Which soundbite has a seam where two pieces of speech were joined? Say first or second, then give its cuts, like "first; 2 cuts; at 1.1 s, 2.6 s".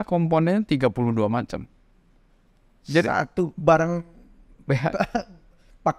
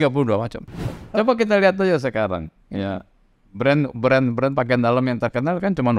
second; 1 cut; at 0.9 s